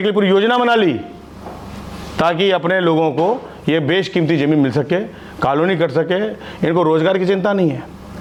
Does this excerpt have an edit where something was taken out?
no; 0 cuts

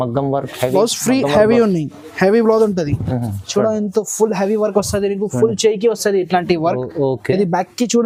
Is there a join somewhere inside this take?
no; 0 cuts

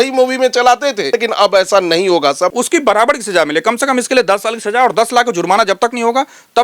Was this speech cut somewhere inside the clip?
yes; 2 cuts; at 1.1 s, 2.5 s

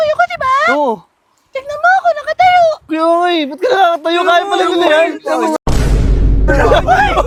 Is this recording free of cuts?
yes; 0 cuts

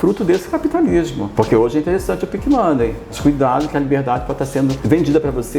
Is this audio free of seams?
no; 3 cuts; at 1.2 s, 3.1 s, 4.8 s

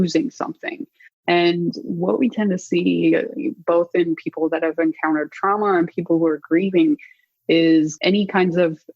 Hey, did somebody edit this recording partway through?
yes; 1 cut; at 8.0 s

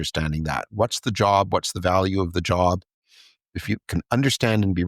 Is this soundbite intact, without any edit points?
no; 1 cut; at 3.4 s

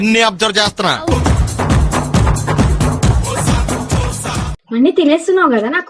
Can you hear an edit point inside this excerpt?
yes; 1 cut; at 1.1 s

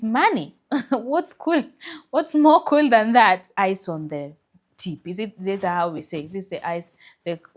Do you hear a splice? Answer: yes; 1 cut; at 3.5 s

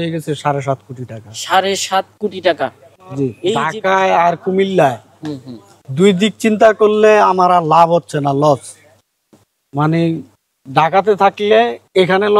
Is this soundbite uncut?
no; 1 cut; at 3.5 s

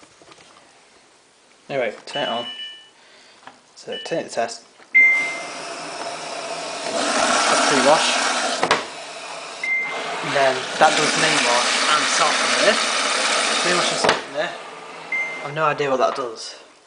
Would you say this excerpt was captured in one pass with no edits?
no; 1 cut; at 4.6 s

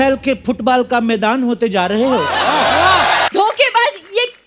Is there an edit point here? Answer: yes; 1 cut; at 3.3 s

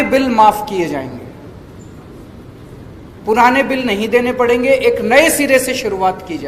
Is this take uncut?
yes; 0 cuts

